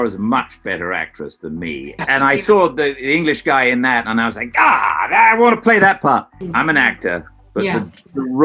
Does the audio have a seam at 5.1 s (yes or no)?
no